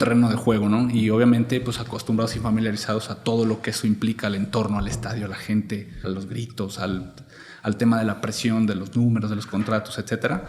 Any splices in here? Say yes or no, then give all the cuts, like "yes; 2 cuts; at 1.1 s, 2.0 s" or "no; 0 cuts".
yes; 1 cut; at 6.0 s